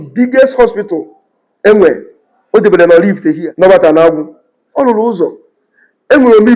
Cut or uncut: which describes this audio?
cut